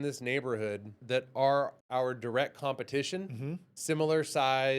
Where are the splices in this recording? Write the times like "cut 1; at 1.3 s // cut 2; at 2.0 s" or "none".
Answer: cut 1; at 1.0 s // cut 2; at 1.8 s